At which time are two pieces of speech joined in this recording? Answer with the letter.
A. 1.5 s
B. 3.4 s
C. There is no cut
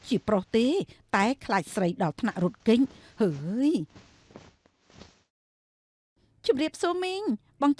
C